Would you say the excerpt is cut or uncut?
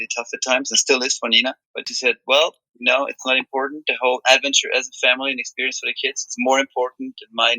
uncut